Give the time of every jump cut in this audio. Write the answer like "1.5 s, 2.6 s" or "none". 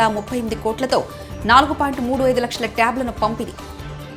none